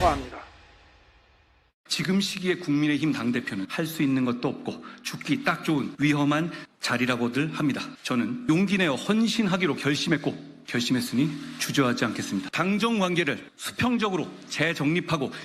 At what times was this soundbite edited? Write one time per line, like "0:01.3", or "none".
0:11.3